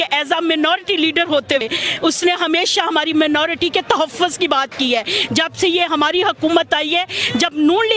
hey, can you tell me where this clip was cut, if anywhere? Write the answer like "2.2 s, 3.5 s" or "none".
1.6 s